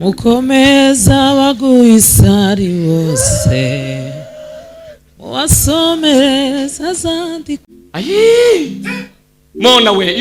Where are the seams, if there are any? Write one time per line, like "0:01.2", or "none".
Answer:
0:07.7